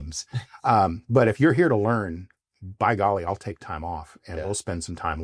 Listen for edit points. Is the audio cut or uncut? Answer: uncut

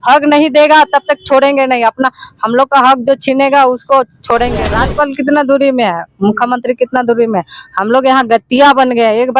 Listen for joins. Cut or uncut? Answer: cut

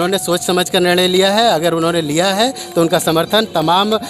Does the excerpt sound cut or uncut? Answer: uncut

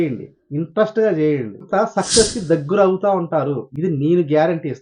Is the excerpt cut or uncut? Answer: cut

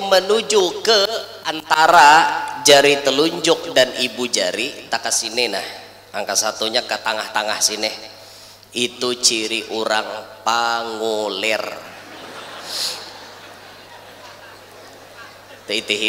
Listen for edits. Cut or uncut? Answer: uncut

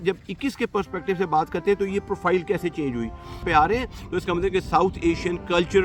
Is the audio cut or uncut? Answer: cut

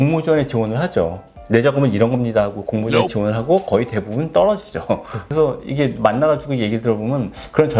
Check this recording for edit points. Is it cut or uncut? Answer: cut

